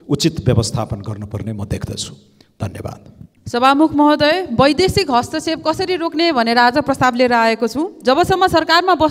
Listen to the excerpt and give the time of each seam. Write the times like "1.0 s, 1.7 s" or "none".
none